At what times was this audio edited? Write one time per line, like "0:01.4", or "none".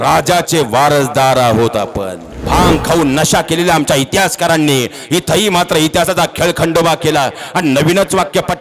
0:02.4